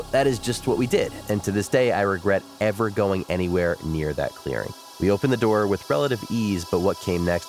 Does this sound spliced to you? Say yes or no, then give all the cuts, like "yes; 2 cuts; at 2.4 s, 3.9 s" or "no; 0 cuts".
yes; 1 cut; at 4.8 s